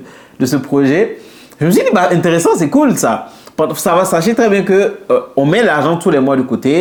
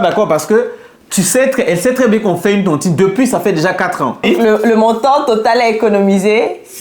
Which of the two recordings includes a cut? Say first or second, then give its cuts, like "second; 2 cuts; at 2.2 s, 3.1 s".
second; 1 cut; at 4.2 s